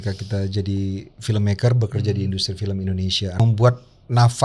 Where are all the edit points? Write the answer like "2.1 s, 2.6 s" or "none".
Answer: 3.4 s